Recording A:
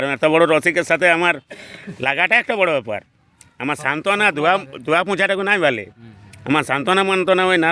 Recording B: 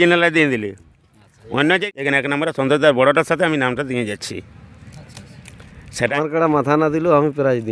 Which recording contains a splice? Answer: B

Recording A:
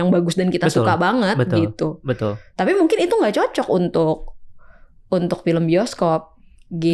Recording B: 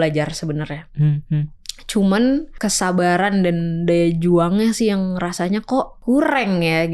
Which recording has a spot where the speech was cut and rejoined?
B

